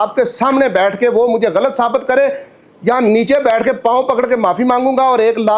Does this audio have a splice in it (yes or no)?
no